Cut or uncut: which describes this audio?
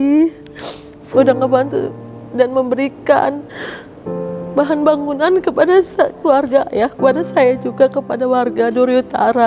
cut